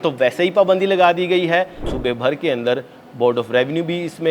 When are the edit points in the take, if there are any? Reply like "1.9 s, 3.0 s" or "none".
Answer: 1.9 s

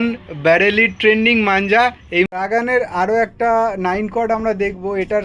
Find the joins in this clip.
2.3 s

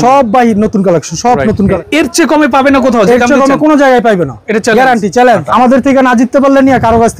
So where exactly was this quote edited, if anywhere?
1.8 s, 5.4 s

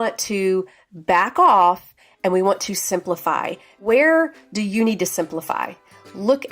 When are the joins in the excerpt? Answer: 3.8 s

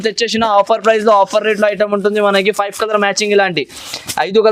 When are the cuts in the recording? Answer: none

